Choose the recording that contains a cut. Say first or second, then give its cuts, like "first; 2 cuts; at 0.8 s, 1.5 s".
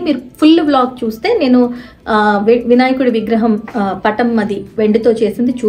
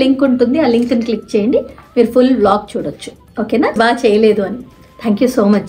second; 1 cut; at 3.8 s